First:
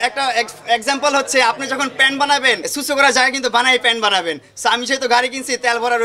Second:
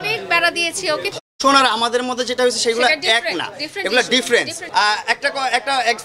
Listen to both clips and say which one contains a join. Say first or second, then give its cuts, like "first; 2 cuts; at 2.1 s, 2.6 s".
second; 2 cuts; at 1.1 s, 4.6 s